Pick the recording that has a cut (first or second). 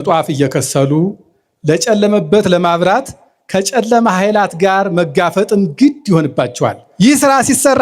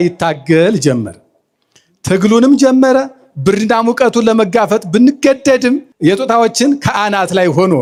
first